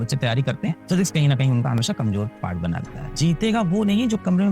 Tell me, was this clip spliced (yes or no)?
yes